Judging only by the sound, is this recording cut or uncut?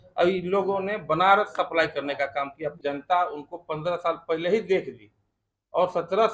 cut